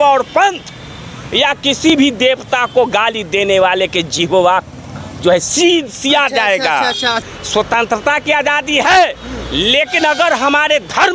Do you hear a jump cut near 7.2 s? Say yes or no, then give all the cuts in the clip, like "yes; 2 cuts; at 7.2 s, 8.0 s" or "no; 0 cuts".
yes; 1 cut; at 7.2 s